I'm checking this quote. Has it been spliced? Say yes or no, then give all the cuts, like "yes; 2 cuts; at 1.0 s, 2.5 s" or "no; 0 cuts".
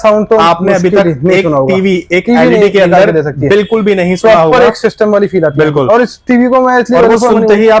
no; 0 cuts